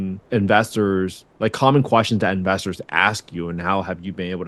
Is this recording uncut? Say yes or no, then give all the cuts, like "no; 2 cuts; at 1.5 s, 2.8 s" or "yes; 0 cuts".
yes; 0 cuts